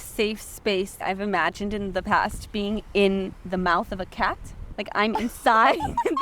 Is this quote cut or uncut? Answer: cut